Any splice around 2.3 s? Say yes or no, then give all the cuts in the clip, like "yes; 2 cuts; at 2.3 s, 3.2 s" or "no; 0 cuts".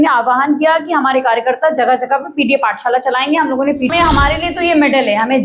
no; 1 cut; at 3.9 s